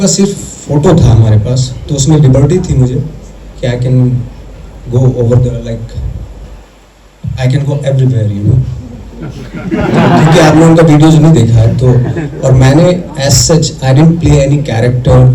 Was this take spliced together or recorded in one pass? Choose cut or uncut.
uncut